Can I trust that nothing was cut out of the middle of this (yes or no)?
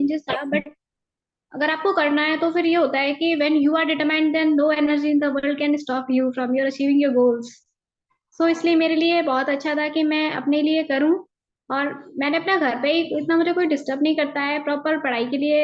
yes